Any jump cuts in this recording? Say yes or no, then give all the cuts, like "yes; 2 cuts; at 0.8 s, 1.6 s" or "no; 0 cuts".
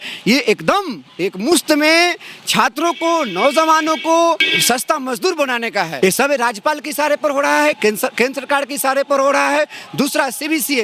yes; 2 cuts; at 4.5 s, 5.9 s